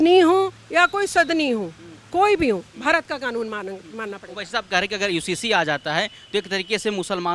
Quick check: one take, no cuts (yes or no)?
yes